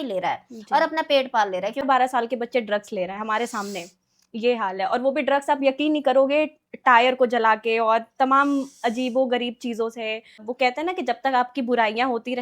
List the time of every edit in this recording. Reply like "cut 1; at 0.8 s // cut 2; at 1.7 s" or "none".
cut 1; at 1.8 s // cut 2; at 10.4 s